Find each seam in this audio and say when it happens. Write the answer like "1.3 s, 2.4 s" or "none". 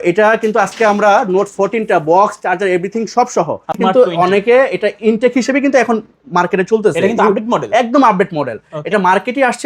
3.8 s